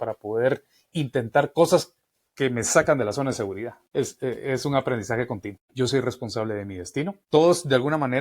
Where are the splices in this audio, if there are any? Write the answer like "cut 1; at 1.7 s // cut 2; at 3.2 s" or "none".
cut 1; at 3.8 s // cut 2; at 5.6 s // cut 3; at 7.2 s

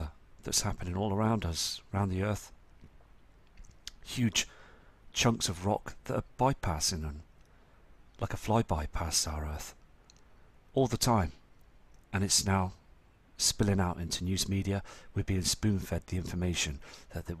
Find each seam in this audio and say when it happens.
cut 1; at 9.1 s

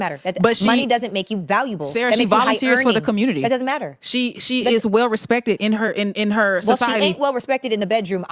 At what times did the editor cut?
cut 1; at 4.0 s

